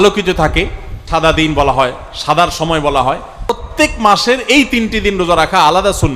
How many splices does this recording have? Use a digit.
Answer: 2